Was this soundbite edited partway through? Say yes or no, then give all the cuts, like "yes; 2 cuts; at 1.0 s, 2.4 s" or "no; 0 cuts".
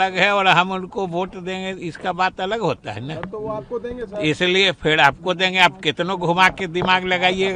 no; 0 cuts